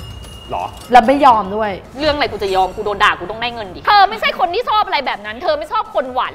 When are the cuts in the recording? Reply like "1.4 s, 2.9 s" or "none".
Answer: 3.7 s